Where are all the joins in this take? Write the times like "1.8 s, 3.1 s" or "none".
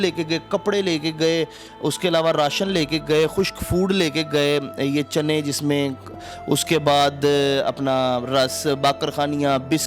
none